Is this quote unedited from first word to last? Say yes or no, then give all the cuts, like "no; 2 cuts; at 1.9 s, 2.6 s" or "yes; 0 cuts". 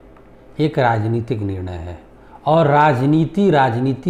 yes; 0 cuts